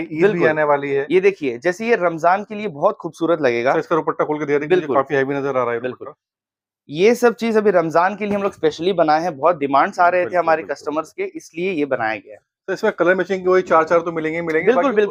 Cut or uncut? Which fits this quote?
uncut